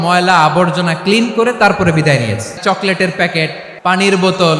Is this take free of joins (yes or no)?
no